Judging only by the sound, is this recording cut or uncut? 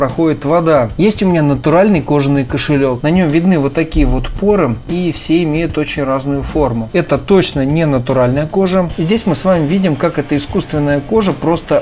cut